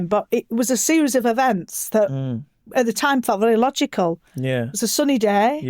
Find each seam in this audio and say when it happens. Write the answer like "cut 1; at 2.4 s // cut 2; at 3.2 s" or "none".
none